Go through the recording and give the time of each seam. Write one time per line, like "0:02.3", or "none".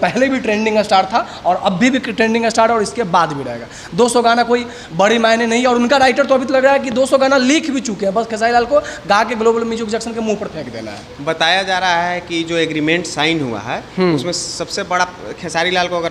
none